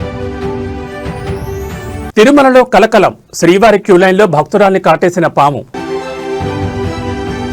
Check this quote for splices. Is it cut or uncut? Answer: cut